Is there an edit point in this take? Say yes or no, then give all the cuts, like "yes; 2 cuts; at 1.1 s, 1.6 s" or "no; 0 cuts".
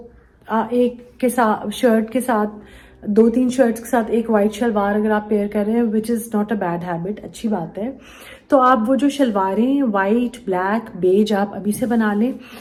no; 0 cuts